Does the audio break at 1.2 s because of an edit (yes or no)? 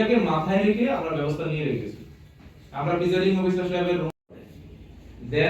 no